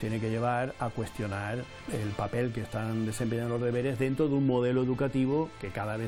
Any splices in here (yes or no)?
no